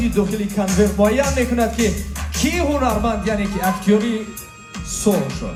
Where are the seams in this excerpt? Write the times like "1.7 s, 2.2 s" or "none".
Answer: none